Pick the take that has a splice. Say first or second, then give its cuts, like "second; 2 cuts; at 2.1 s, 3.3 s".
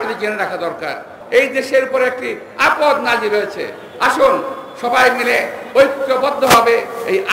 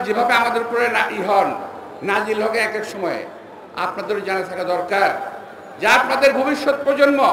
first; 1 cut; at 1.1 s